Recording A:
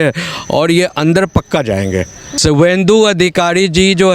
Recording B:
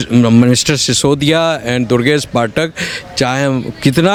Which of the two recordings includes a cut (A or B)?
A